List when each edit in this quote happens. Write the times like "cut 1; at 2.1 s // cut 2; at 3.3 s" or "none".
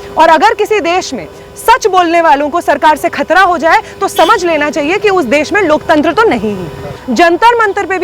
cut 1; at 7.0 s